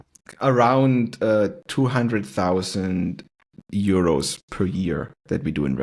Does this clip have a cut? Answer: no; 0 cuts

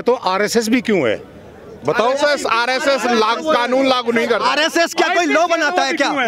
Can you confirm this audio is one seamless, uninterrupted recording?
yes; 0 cuts

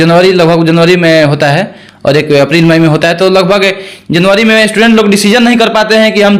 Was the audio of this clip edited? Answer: no; 0 cuts

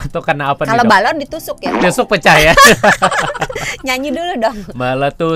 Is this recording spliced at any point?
no; 0 cuts

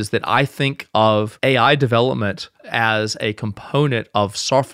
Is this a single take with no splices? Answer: no; 1 cut; at 1.3 s

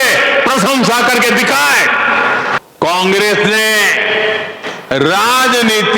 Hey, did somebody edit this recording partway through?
yes; 1 cut; at 2.6 s

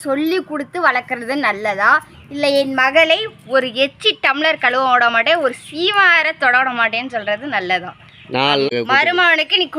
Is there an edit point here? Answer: yes; 1 cut; at 8.7 s

